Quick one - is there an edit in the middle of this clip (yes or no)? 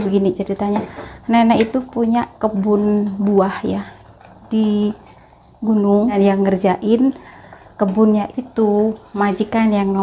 yes